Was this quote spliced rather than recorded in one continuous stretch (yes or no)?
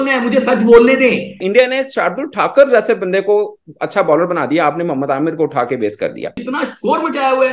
yes